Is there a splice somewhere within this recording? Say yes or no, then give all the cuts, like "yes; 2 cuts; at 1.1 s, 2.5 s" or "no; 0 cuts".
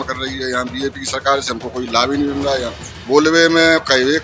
yes; 1 cut; at 3.0 s